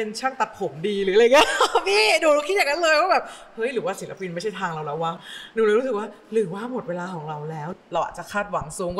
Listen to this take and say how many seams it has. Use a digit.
2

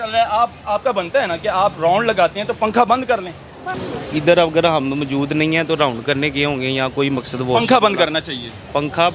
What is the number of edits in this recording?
1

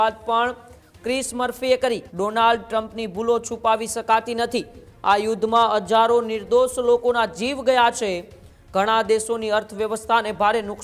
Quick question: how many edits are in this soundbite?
1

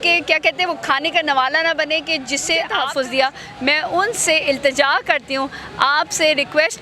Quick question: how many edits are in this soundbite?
1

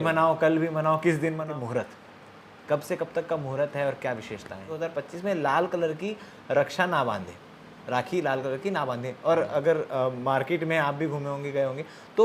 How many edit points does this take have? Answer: 2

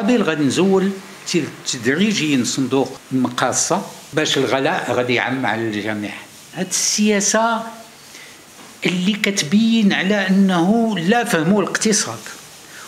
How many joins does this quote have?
3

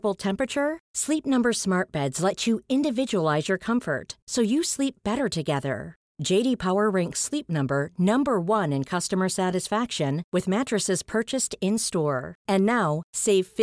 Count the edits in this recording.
0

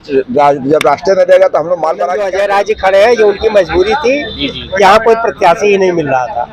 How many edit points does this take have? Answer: 1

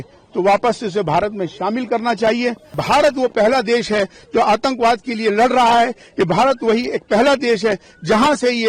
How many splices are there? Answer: 1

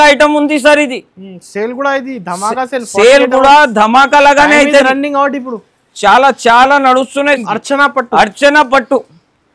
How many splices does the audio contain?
1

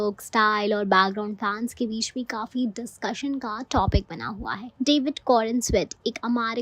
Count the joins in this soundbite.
1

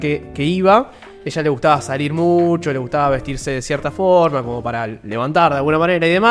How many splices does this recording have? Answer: 0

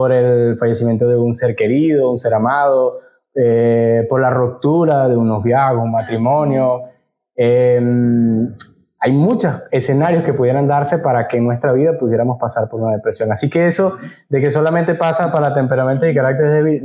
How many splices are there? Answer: 0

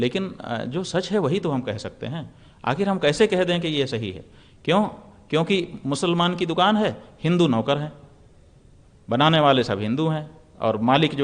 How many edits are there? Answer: 0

